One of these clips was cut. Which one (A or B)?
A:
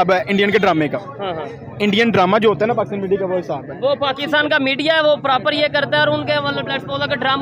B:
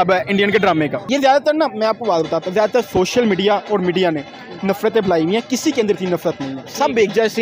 B